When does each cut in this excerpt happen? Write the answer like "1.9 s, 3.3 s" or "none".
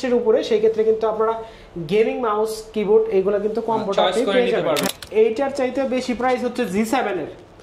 4.9 s